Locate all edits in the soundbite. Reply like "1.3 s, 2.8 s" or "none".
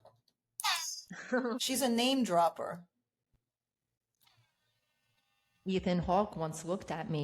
1.6 s